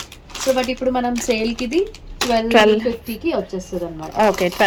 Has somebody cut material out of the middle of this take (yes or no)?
no